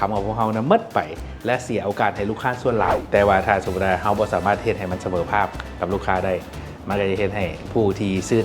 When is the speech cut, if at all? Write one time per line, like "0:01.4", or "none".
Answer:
0:03.0